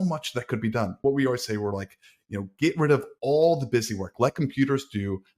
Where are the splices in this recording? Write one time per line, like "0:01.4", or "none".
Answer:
0:01.0